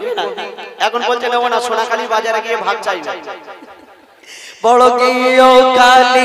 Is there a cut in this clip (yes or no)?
no